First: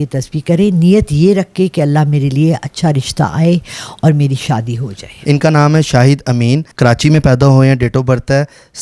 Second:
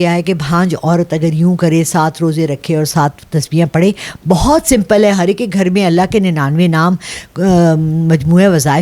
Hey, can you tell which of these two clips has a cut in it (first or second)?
first